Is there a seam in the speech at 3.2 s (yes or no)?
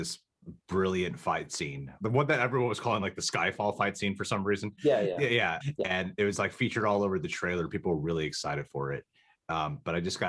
no